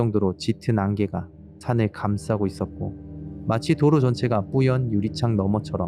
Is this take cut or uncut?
uncut